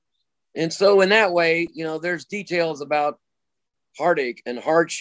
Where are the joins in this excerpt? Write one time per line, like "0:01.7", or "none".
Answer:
none

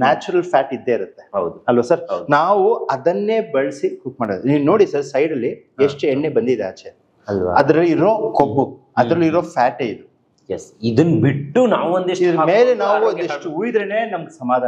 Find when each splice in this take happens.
none

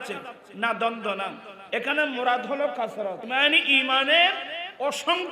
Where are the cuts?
0:03.2

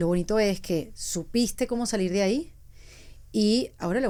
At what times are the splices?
none

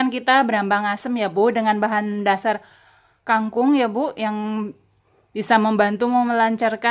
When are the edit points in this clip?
none

